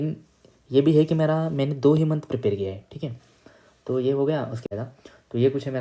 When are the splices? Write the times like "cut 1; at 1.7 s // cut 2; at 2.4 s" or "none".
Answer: cut 1; at 4.7 s